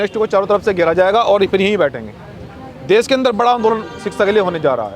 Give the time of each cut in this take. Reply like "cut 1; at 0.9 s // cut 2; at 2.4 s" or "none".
none